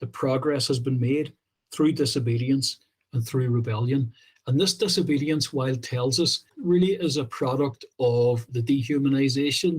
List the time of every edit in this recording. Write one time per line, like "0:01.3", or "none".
0:06.5
0:08.4